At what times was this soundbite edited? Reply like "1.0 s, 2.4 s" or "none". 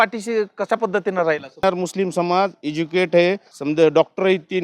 1.6 s, 3.5 s